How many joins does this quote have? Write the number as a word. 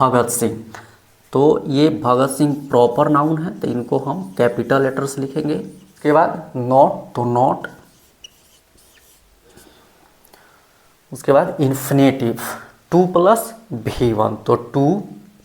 one